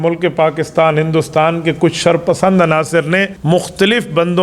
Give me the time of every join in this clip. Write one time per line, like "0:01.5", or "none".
0:03.3